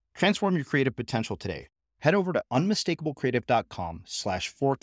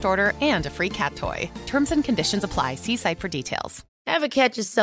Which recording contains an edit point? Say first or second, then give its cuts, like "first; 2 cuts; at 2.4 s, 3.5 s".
second; 1 cut; at 3.9 s